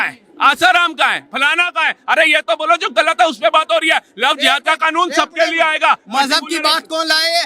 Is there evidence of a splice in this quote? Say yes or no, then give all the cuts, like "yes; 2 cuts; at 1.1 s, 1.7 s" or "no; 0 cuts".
no; 0 cuts